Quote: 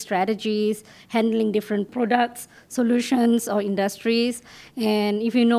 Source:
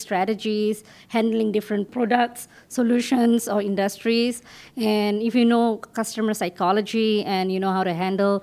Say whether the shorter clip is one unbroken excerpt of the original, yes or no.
yes